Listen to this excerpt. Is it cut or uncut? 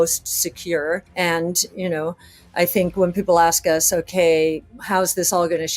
cut